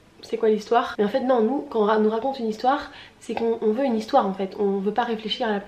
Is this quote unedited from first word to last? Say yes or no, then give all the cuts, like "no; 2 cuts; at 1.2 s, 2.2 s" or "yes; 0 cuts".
no; 1 cut; at 0.9 s